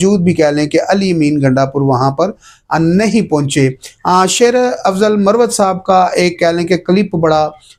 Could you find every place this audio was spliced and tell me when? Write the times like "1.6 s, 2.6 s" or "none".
none